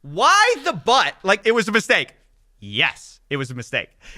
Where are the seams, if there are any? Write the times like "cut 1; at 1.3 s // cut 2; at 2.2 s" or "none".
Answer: cut 1; at 1.4 s